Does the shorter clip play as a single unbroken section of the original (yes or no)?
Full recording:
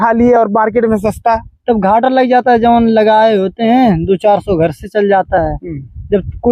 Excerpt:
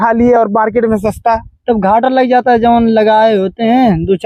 yes